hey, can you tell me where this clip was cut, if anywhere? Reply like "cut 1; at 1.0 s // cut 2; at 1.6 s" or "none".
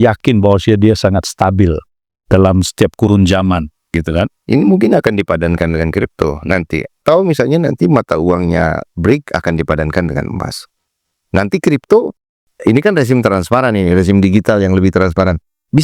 cut 1; at 7.0 s

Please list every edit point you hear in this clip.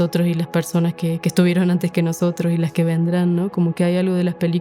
none

